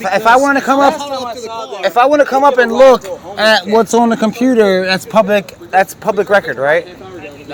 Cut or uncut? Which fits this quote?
uncut